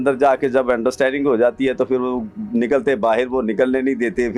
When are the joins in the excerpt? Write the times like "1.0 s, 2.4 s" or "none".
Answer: none

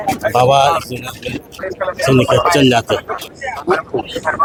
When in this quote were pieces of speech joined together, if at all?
none

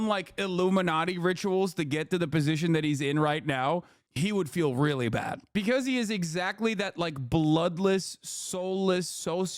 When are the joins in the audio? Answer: 5.5 s

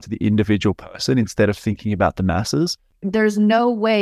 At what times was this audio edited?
2.9 s

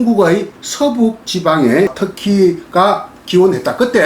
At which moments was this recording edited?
2.0 s

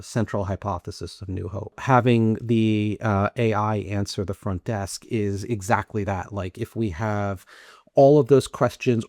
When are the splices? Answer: 1.8 s

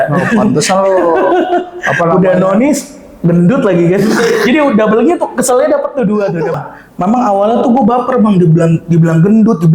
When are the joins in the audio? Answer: 6.5 s

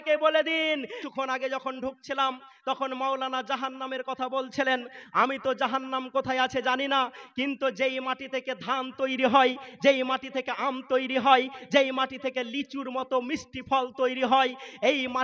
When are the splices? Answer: 0.9 s

